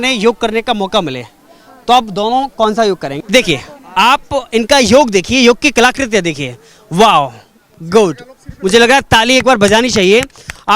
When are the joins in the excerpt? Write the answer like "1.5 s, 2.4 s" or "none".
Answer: 3.1 s